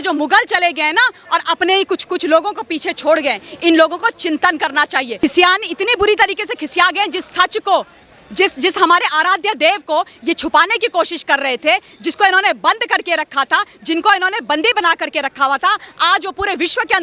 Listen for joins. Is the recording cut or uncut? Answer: cut